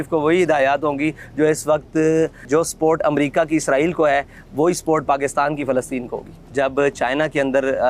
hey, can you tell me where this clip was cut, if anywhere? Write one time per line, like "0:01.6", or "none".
0:02.4
0:06.4